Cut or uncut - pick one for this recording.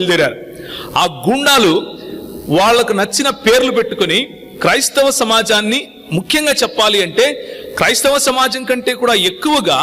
uncut